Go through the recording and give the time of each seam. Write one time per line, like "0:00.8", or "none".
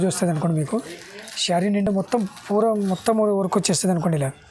none